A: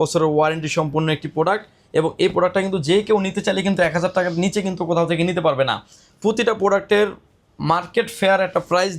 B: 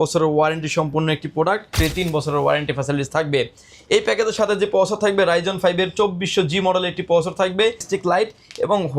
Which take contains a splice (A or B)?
B